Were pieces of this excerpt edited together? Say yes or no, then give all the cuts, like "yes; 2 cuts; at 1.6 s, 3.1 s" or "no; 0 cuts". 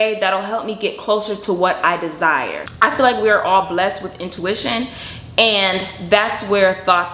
yes; 1 cut; at 2.6 s